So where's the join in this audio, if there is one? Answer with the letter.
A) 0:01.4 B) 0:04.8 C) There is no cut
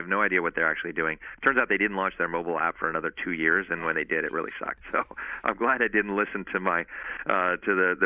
B